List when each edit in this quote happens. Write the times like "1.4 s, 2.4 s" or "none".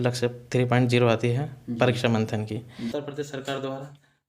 2.8 s